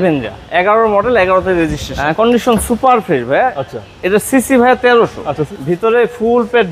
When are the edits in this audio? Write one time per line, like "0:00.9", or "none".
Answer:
0:01.9
0:05.4